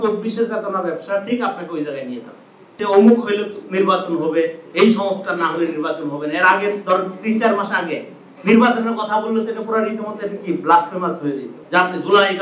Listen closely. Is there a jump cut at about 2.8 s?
yes; 2 cuts; at 2.8 s, 11.5 s

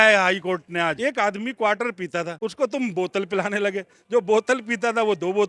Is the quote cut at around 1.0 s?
yes; 2 cuts; at 1.0 s, 2.3 s

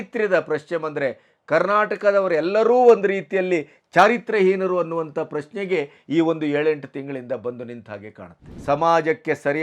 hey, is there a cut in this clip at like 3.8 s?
no; 1 cut; at 8.5 s

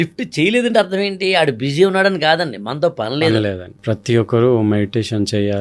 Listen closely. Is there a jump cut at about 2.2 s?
no; 1 cut; at 3.7 s

